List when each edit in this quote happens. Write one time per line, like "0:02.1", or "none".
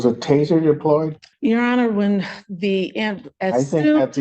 0:01.2